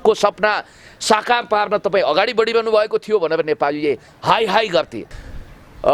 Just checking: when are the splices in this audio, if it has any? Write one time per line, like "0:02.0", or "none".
0:05.0